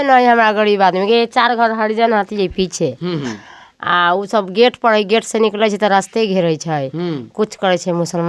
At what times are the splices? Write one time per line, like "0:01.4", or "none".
none